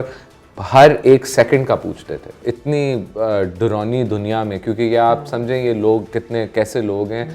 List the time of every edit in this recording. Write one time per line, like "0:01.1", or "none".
0:02.4